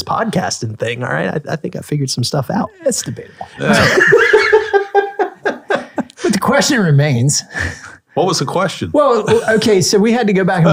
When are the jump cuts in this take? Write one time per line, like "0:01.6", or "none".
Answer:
none